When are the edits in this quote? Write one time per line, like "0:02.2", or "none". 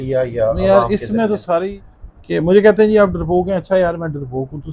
0:01.7